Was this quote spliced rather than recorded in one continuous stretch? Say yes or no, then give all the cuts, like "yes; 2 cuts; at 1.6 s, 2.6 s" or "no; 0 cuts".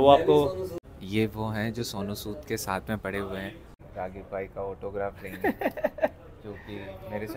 yes; 2 cuts; at 0.8 s, 3.8 s